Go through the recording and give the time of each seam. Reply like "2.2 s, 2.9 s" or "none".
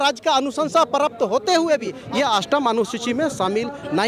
2.0 s

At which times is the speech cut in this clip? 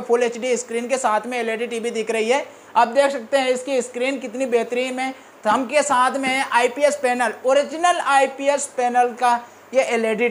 none

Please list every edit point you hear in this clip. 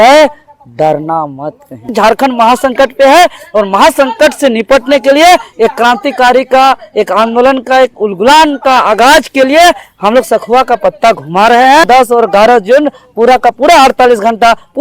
1.9 s, 11.9 s

